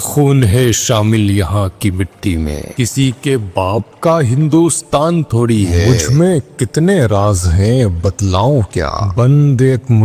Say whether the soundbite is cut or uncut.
cut